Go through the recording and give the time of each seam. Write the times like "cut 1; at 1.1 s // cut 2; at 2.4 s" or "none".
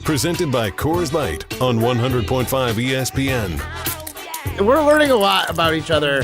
cut 1; at 4.5 s

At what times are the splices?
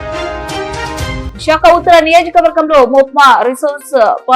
cut 1; at 1.2 s

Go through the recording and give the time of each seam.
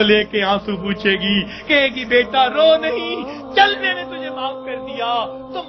none

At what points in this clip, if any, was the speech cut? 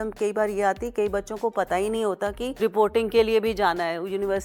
cut 1; at 2.6 s

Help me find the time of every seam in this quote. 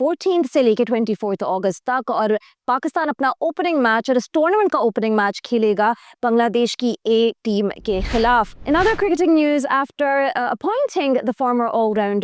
cut 1; at 8.5 s

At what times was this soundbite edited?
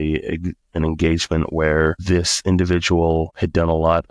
none

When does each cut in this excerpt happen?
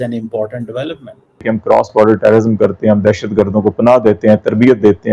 cut 1; at 1.5 s

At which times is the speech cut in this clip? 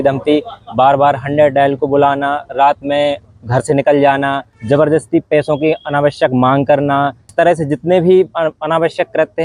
cut 1; at 4.5 s // cut 2; at 7.2 s

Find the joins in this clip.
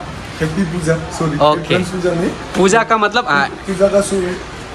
none

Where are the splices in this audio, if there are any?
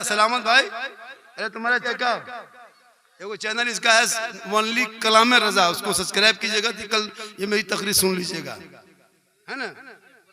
cut 1; at 1.8 s

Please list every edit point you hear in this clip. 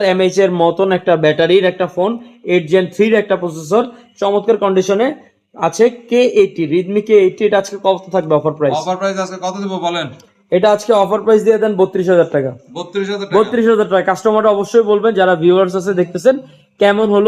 none

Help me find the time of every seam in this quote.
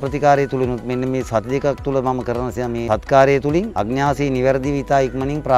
cut 1; at 2.8 s // cut 2; at 3.7 s

